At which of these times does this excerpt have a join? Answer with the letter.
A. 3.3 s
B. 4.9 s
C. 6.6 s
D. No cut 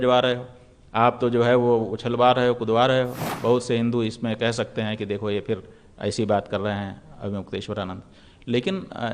A